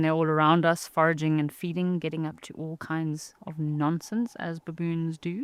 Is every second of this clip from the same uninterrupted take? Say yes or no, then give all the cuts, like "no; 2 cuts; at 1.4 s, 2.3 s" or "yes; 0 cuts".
yes; 0 cuts